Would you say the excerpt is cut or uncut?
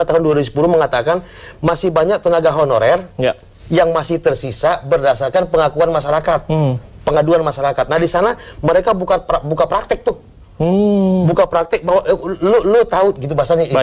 uncut